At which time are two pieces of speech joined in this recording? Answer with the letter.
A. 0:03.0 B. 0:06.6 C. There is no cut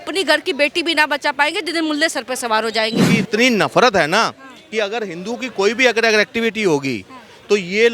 A